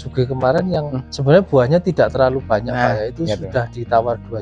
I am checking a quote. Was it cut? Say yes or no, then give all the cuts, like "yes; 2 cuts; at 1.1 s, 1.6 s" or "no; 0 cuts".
yes; 1 cut; at 1.0 s